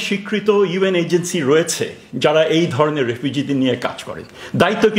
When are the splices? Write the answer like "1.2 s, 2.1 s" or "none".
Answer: none